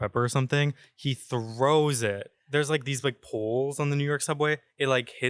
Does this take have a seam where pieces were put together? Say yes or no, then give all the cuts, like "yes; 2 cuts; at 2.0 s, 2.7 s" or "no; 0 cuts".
yes; 1 cut; at 2.3 s